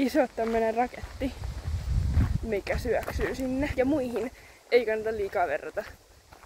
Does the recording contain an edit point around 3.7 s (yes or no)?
yes